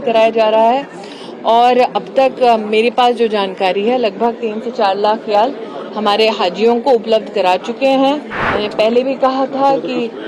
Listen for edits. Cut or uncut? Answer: cut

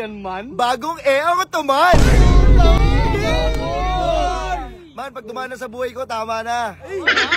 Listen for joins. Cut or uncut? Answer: uncut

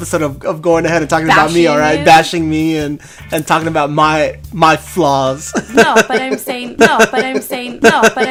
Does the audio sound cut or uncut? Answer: uncut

